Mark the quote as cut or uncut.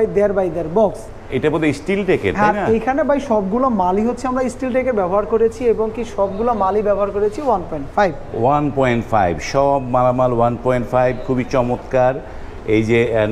uncut